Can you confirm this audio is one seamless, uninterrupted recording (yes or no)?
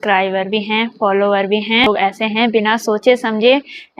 no